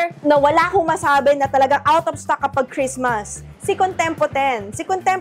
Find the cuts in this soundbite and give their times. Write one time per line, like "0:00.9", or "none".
0:03.5